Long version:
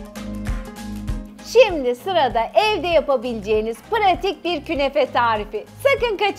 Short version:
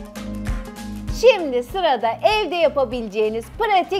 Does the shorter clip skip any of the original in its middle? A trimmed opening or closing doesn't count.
yes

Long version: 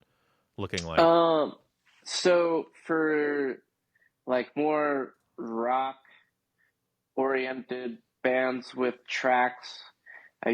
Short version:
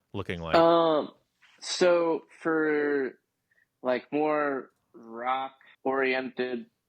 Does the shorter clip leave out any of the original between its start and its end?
yes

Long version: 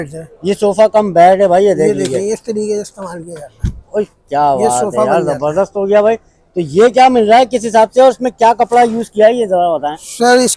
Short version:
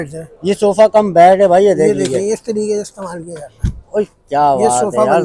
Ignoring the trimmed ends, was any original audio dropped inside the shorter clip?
no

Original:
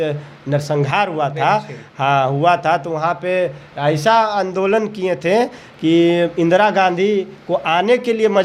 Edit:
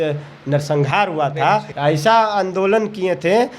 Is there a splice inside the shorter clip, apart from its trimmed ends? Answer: yes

